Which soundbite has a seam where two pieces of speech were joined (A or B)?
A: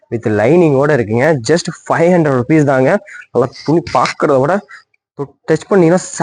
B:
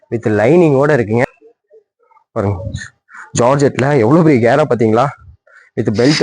B